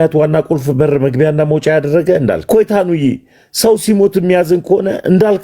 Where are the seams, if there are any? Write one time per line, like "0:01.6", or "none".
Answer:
0:02.4